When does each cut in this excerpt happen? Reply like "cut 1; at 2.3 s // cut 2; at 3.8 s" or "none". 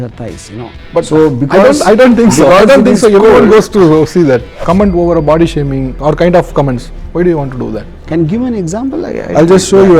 cut 1; at 4.5 s // cut 2; at 5.9 s